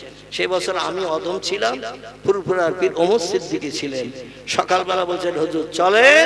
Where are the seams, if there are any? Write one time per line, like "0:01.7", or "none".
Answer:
none